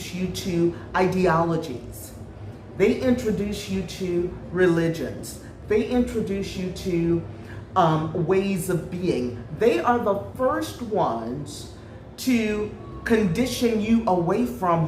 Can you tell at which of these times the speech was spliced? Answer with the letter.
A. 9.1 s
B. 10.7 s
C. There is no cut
C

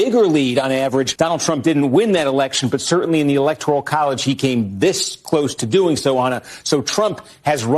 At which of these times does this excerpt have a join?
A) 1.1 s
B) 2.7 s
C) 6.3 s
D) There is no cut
A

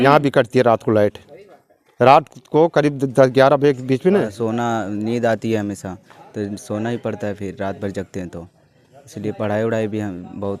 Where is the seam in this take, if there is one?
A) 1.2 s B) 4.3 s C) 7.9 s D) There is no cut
B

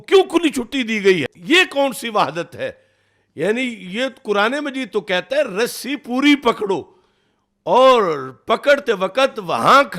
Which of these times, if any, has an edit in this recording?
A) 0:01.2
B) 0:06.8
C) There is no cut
A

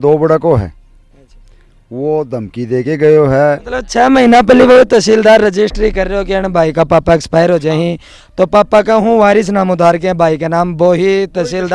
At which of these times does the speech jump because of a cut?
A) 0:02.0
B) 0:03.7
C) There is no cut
B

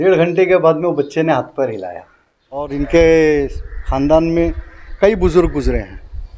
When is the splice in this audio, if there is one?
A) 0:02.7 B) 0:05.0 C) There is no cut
A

